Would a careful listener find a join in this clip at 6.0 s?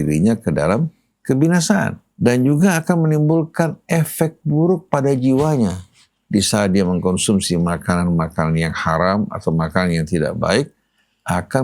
no; 1 cut; at 2.0 s

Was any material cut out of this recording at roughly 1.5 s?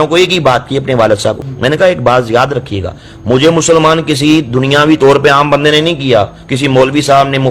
yes; 1 cut; at 1.5 s

